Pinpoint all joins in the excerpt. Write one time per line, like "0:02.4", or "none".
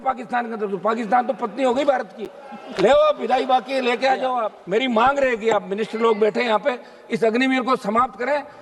0:04.5

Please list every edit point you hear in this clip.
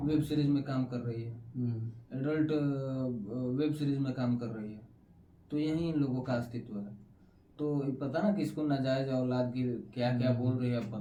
none

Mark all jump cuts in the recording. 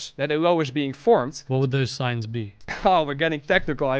0:01.4
0:02.6

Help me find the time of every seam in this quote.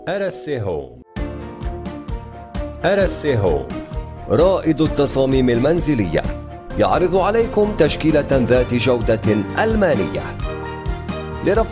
0:01.0

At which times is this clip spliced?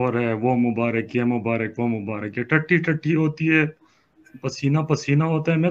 none

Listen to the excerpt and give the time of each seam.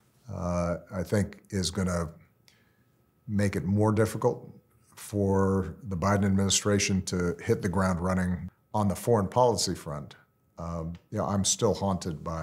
0:08.5

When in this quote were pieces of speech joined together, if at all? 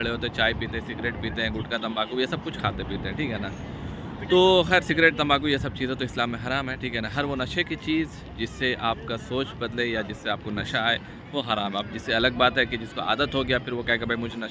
none

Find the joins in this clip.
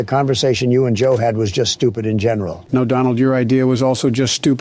0:02.6

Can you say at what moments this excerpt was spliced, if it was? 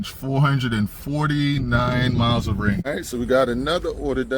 0:02.9

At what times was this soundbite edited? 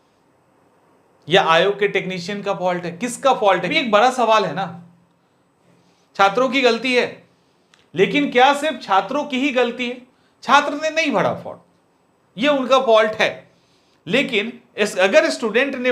0:03.8
0:05.7

